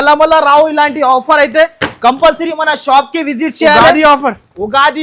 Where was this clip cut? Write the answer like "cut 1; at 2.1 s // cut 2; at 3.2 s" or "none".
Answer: none